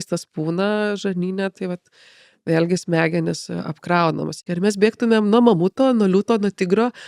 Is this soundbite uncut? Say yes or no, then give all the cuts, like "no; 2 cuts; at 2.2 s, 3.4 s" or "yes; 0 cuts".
no; 1 cut; at 4.4 s